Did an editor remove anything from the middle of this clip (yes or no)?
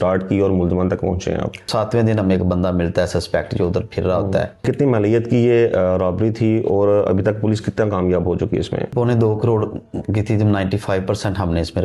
yes